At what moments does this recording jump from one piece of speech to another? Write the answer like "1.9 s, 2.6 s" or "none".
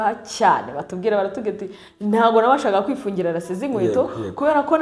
none